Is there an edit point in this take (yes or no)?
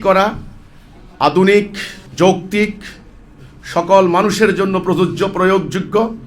no